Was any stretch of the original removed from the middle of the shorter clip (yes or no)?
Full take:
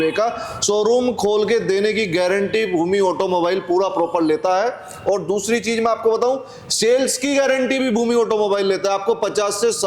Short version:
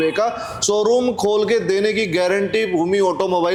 no